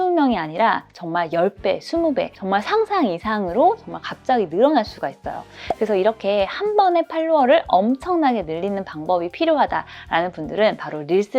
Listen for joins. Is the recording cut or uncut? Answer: uncut